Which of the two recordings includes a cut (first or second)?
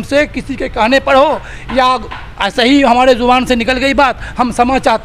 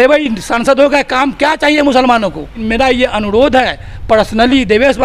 second